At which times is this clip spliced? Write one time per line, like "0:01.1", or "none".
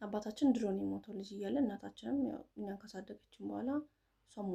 none